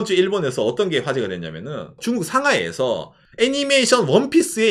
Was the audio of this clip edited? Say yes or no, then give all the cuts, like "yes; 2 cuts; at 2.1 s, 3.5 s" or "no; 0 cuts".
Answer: no; 0 cuts